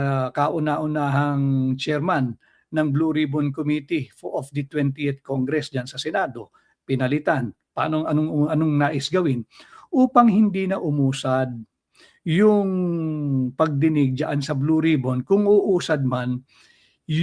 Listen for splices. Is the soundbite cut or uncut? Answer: uncut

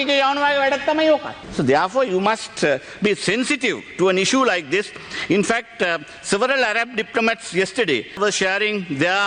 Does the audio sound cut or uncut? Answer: uncut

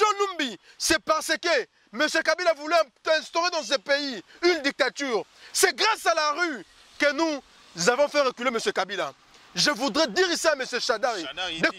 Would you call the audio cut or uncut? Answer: uncut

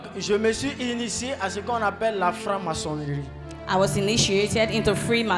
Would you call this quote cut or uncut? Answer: uncut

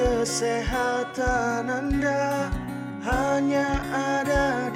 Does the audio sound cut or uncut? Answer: uncut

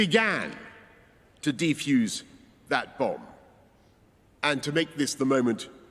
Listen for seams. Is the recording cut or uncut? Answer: cut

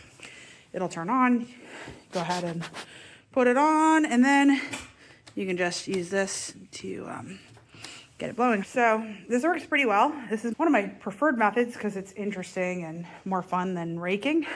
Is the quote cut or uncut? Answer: cut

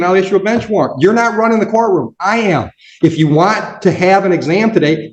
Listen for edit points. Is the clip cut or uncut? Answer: uncut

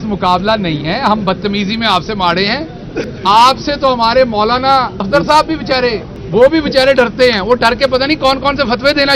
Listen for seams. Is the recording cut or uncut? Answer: cut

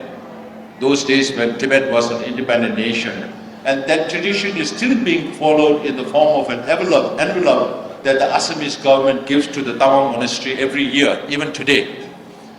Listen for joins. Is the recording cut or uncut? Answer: uncut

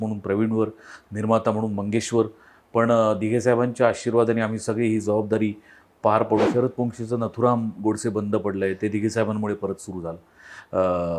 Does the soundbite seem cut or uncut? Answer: cut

